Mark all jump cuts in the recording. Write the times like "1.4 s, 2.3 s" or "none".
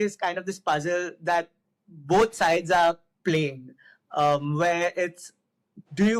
none